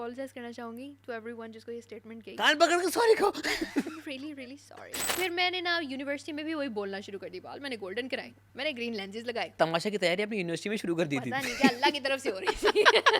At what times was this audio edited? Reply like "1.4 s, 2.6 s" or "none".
5.1 s, 8.4 s, 9.5 s